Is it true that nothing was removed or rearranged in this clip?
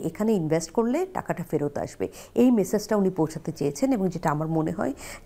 yes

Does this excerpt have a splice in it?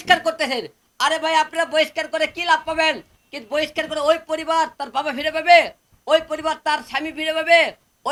no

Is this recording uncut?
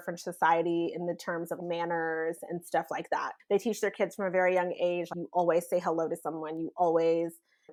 yes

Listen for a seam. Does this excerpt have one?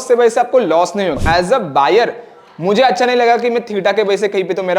yes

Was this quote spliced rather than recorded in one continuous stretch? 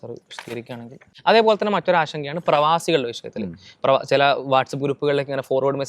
yes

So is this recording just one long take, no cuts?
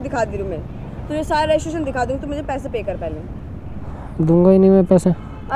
yes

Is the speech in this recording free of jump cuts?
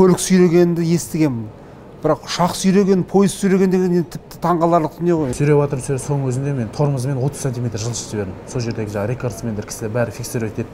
no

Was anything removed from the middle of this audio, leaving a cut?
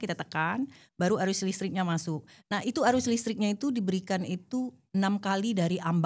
no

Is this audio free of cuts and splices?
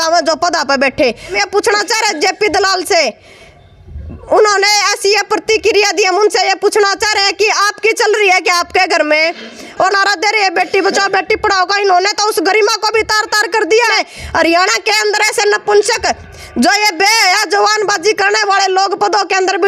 no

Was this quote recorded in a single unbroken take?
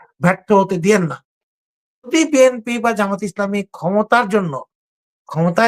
no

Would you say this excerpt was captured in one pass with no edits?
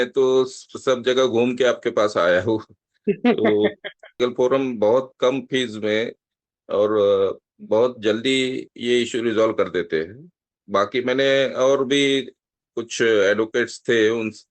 no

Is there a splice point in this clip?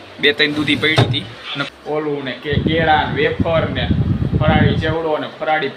yes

